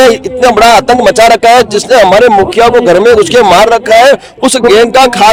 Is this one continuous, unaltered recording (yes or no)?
yes